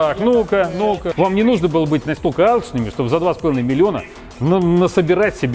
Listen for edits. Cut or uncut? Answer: cut